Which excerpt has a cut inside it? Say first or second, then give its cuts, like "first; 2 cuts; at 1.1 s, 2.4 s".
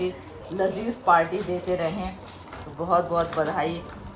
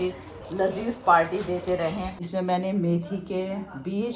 second; 1 cut; at 2.2 s